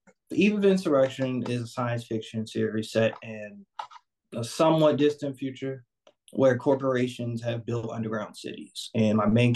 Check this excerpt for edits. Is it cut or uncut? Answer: uncut